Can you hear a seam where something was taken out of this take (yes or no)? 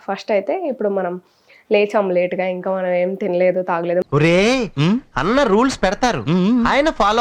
no